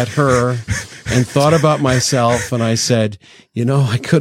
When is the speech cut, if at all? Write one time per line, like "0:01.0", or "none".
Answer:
none